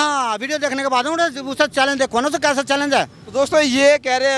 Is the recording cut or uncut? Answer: uncut